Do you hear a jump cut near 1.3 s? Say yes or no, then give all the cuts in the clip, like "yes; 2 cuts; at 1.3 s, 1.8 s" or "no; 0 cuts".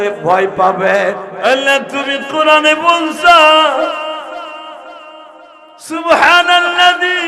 yes; 1 cut; at 1.3 s